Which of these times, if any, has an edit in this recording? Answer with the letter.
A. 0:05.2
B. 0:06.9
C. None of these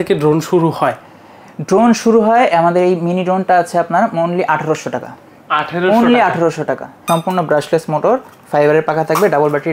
B